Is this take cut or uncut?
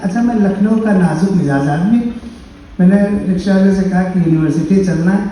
uncut